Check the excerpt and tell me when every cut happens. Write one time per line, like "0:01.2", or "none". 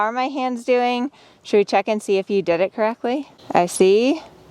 0:03.3